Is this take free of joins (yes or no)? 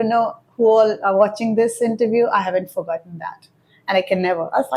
yes